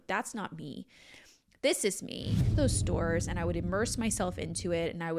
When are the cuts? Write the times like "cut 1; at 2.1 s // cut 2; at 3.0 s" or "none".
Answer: cut 1; at 2.6 s

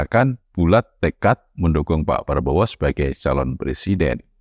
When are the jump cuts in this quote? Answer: none

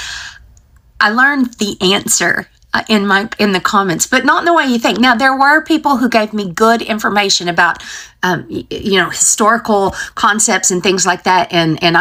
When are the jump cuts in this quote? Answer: none

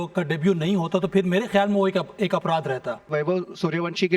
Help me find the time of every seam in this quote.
cut 1; at 3.1 s

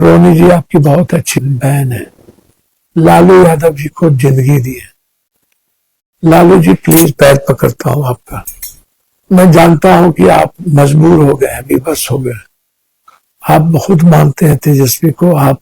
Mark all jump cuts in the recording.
cut 1; at 1.4 s

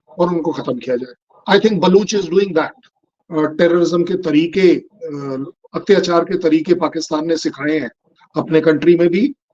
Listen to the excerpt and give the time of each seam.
cut 1; at 3.1 s

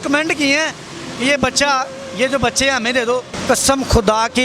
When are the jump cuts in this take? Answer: cut 1; at 3.3 s

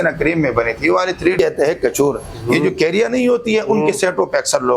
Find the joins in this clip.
cut 1; at 1.3 s

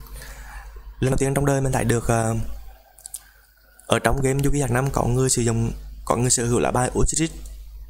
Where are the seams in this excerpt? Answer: cut 1; at 1.1 s

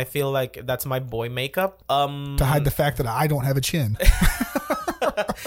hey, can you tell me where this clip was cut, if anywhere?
cut 1; at 1.8 s

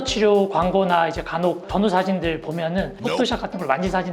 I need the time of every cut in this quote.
none

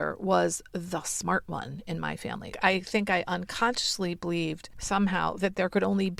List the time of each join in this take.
cut 1; at 2.5 s // cut 2; at 4.7 s

